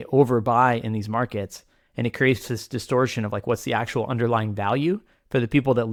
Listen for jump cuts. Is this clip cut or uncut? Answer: uncut